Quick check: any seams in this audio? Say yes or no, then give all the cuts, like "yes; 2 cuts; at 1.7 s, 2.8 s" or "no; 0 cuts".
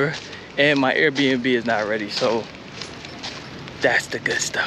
no; 0 cuts